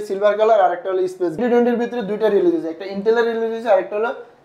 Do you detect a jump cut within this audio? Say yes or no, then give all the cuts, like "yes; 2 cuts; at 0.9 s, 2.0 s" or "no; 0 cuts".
yes; 1 cut; at 1.4 s